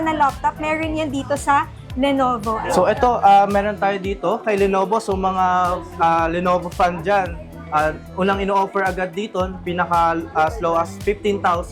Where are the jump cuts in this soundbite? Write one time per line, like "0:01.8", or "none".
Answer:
none